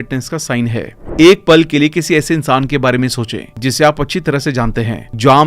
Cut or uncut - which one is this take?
cut